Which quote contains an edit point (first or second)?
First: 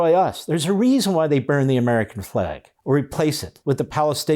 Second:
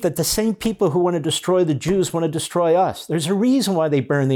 first